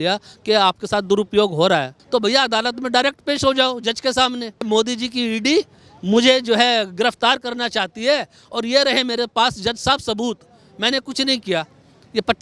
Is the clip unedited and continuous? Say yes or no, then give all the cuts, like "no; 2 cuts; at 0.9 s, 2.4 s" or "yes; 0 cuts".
no; 2 cuts; at 2.0 s, 4.7 s